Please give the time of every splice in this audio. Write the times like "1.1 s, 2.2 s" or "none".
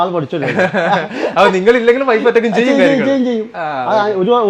none